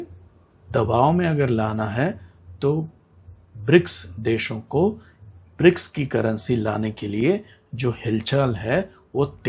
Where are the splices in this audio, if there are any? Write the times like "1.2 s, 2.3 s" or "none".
none